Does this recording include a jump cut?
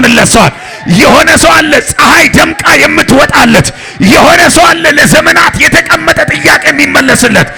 no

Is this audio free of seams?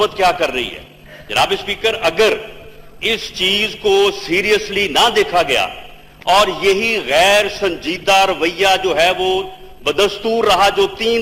yes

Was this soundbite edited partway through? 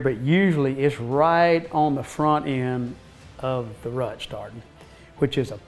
no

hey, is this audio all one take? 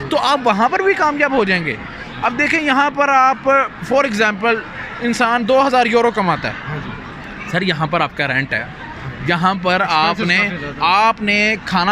yes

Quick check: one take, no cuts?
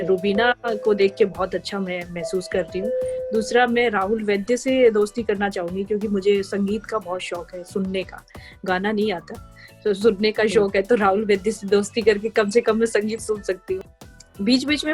no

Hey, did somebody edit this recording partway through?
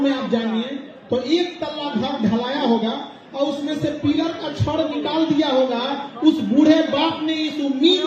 no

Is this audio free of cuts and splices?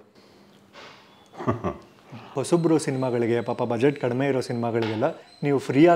no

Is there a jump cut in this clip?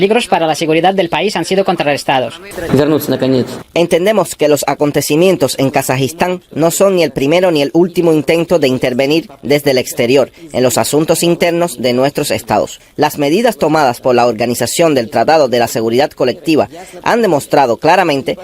yes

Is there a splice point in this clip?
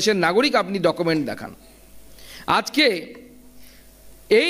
no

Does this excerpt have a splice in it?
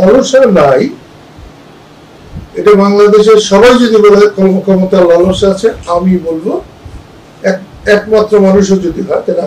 no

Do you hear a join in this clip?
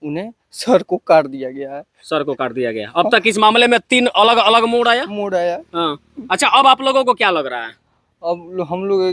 no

